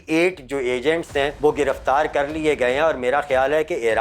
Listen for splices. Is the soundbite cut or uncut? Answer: cut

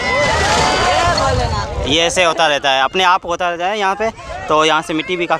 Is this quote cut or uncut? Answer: uncut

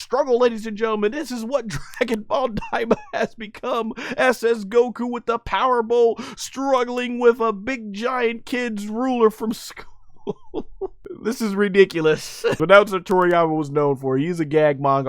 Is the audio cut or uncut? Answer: cut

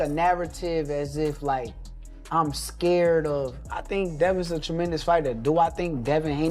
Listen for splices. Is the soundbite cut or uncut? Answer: cut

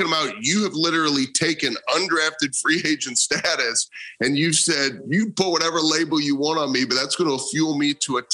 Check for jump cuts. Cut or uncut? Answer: uncut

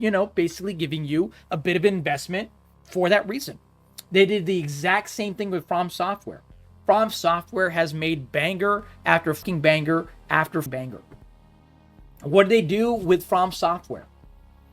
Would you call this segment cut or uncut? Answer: cut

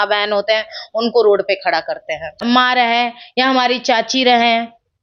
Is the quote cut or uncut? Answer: cut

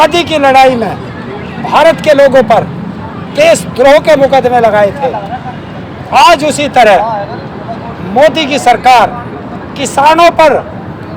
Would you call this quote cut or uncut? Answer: uncut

